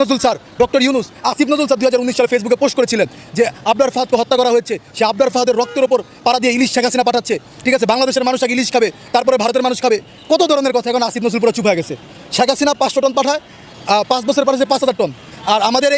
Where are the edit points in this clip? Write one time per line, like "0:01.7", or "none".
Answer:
none